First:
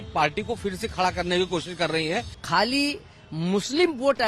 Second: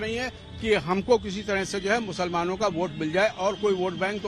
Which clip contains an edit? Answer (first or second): first